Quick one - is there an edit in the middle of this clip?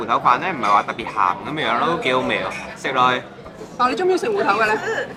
no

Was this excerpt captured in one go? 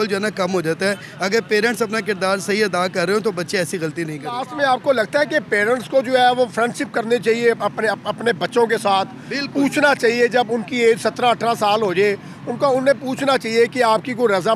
no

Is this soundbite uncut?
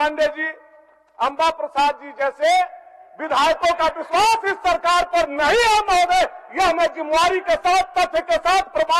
yes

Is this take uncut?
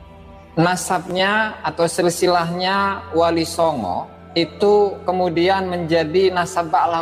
no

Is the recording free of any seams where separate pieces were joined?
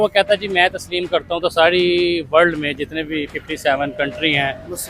yes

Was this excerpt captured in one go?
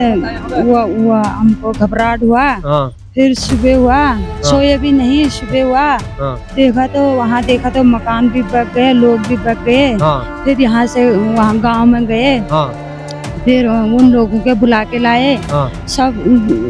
yes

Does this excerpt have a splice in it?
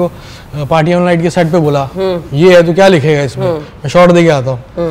no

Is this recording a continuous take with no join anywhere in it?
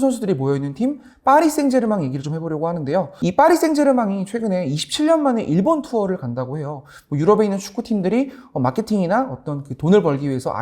no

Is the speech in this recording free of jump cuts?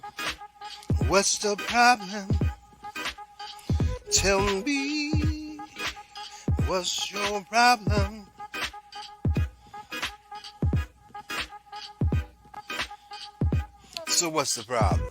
no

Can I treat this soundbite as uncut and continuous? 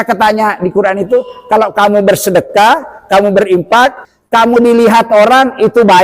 no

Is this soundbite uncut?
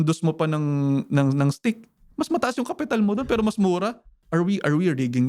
no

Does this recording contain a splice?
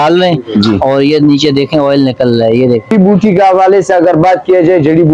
yes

